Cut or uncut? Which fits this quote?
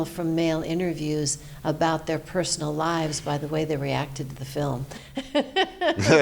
uncut